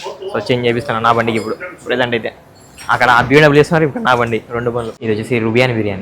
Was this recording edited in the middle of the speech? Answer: yes; 1 cut; at 4.9 s

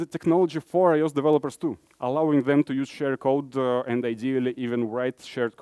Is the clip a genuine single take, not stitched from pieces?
yes; 0 cuts

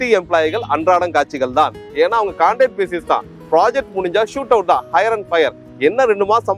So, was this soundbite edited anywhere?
no; 0 cuts

